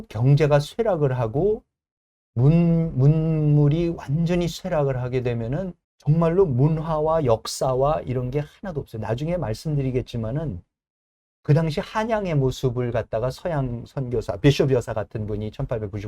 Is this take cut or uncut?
cut